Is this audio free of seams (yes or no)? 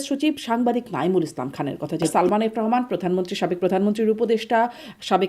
no